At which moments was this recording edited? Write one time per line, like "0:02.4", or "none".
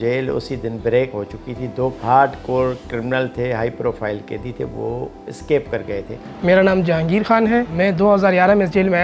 0:02.0
0:06.2
0:07.7